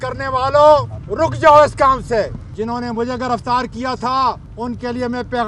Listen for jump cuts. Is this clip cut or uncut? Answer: cut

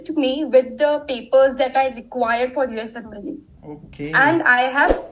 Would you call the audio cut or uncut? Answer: uncut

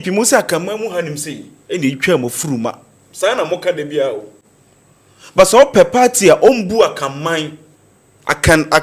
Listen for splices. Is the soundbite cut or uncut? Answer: uncut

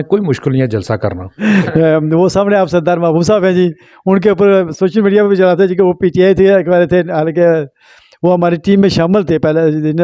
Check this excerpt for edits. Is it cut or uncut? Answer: cut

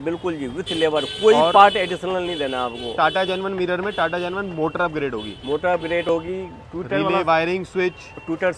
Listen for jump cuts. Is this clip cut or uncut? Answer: uncut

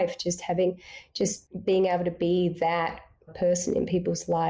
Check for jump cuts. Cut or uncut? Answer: cut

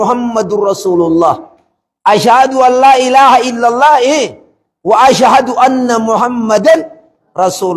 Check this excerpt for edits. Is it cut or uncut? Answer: uncut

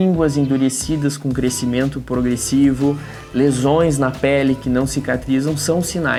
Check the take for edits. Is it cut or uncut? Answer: uncut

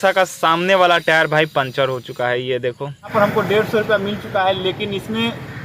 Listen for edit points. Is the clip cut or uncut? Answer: cut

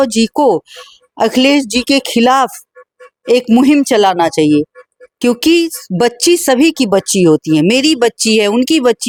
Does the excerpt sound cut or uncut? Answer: uncut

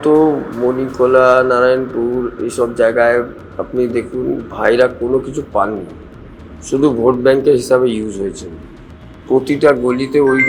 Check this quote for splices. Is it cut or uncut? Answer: uncut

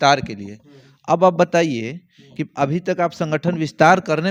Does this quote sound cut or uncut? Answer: uncut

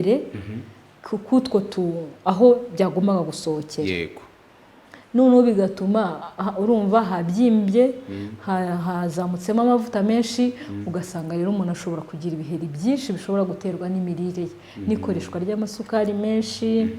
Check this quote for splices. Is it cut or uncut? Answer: uncut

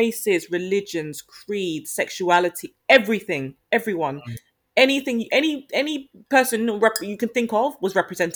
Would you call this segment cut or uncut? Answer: uncut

